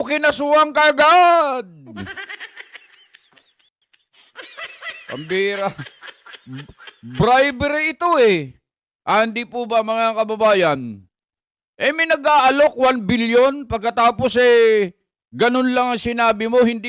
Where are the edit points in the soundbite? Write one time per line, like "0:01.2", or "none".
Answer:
none